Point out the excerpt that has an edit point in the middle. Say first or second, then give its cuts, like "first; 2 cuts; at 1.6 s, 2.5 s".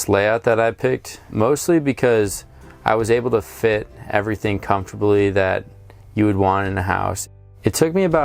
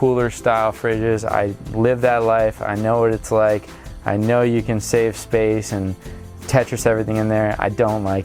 first; 1 cut; at 7.2 s